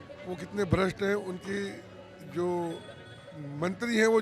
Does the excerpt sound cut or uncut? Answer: uncut